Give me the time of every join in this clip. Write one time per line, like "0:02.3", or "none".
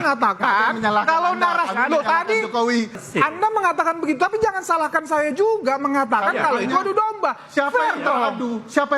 0:03.0